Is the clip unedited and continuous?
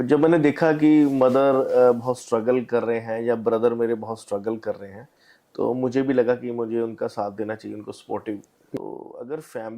no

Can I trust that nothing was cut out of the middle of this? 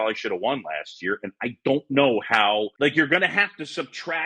no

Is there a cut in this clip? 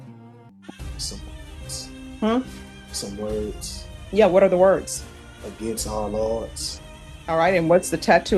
no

